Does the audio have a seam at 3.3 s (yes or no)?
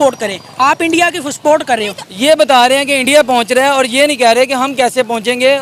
no